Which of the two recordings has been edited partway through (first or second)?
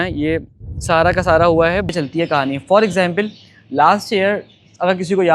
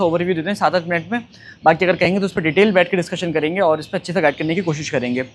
first